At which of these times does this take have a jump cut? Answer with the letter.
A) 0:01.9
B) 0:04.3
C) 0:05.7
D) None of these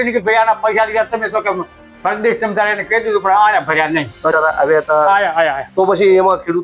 B